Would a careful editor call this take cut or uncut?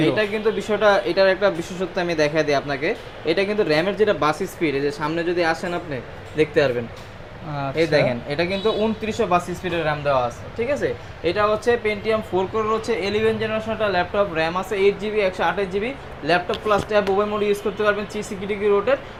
uncut